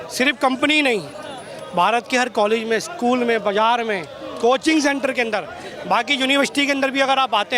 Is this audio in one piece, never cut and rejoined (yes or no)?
yes